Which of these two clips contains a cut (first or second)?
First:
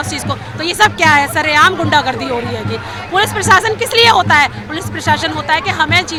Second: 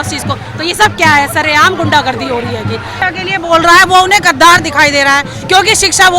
second